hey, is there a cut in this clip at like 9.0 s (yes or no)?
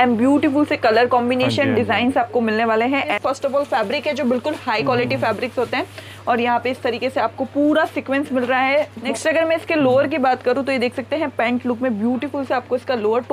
yes